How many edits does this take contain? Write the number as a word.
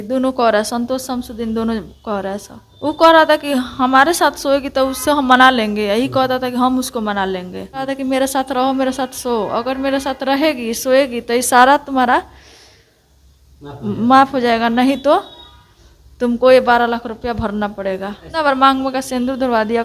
three